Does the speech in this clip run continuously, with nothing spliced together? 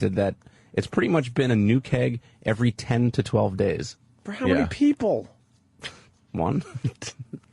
no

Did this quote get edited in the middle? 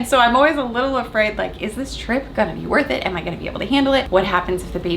yes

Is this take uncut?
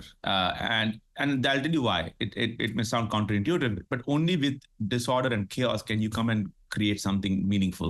yes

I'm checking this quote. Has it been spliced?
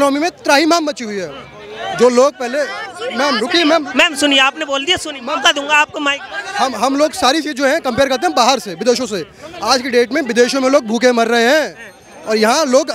no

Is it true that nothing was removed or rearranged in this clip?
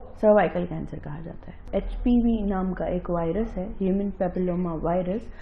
no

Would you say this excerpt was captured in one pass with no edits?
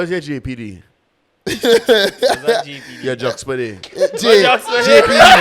yes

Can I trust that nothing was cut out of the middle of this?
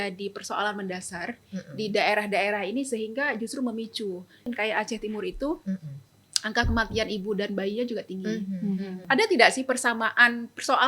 no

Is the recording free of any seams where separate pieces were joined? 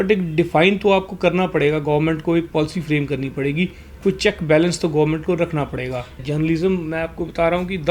no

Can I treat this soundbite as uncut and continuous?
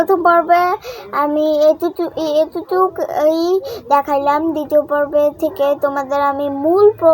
yes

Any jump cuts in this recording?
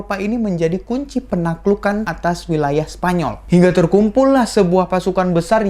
yes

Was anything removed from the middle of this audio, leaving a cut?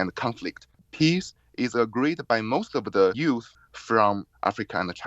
yes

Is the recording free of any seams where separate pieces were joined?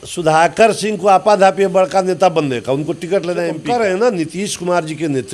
no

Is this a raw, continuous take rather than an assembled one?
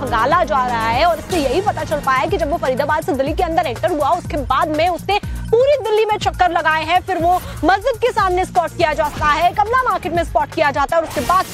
yes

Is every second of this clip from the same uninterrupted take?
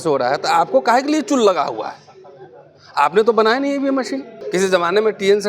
no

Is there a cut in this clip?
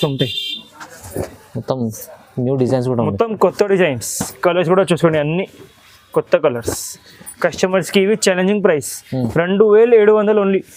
no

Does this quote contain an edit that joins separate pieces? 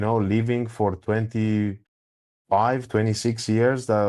no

